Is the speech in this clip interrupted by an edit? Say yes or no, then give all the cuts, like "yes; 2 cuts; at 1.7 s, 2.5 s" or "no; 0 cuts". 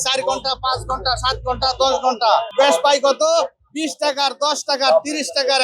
yes; 1 cut; at 2.5 s